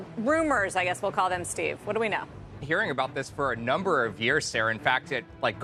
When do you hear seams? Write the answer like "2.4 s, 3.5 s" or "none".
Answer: 2.6 s